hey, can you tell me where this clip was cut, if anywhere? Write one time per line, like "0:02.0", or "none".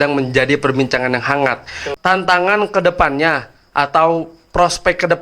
0:01.9